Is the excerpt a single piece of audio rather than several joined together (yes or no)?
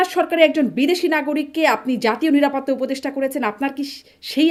yes